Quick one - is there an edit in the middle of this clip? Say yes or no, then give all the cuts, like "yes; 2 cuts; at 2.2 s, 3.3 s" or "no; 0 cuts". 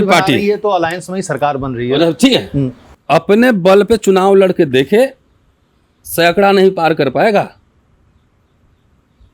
no; 0 cuts